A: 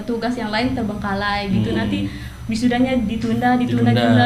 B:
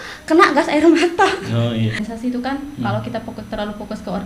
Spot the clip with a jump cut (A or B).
B